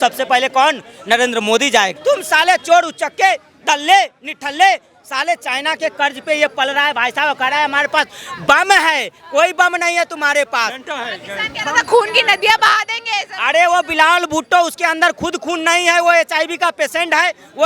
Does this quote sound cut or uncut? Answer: cut